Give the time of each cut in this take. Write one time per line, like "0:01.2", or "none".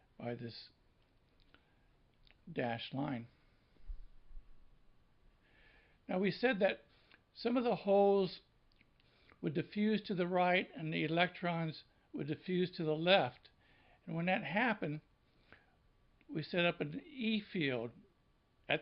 0:02.6